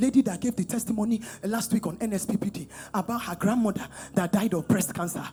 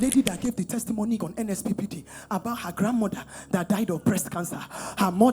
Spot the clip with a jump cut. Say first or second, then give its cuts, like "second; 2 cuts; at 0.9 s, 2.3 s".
second; 1 cut; at 1.2 s